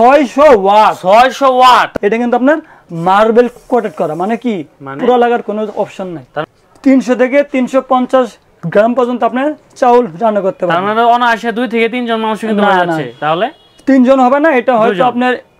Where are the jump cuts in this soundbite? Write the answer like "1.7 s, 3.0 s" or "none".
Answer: 1.9 s, 6.5 s